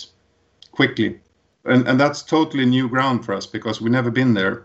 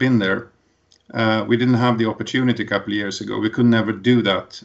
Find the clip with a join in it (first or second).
first